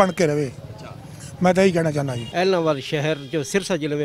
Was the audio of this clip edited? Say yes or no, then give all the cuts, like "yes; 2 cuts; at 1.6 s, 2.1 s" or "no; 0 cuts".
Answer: yes; 1 cut; at 2.2 s